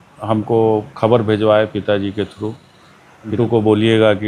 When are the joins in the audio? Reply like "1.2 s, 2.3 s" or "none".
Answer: 3.4 s